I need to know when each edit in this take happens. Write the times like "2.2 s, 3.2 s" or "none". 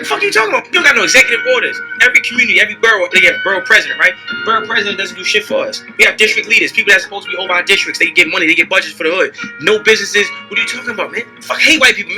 3.8 s

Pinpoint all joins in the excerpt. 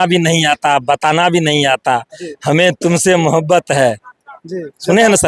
none

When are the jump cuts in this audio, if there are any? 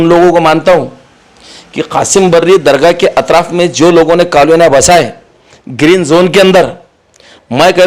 none

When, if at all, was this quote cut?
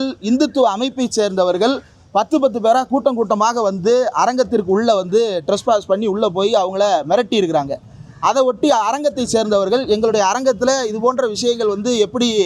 none

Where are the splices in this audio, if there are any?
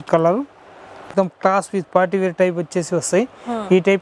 1.1 s

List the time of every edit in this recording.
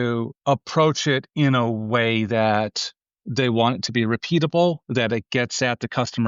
none

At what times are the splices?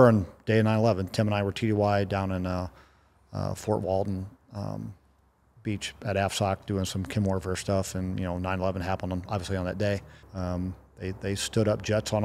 10.2 s

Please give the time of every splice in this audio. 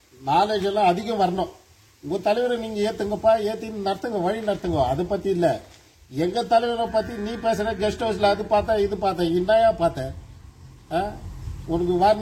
none

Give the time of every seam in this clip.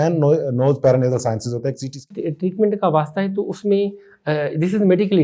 2.1 s

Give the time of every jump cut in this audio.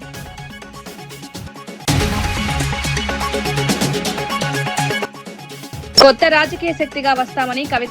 1.0 s, 1.8 s, 5.0 s

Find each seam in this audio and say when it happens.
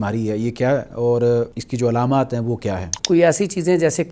1.6 s, 2.9 s

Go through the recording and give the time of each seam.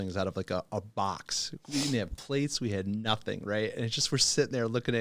none

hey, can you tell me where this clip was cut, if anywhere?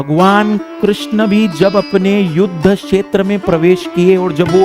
none

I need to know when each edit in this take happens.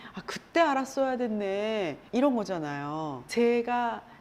2.0 s, 3.2 s

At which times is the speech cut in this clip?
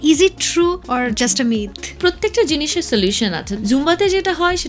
0.8 s, 2.0 s, 3.5 s

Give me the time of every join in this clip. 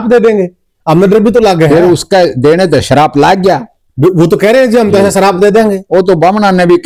none

